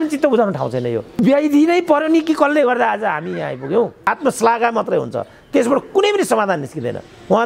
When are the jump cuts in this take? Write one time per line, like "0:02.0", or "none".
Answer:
0:01.2
0:04.0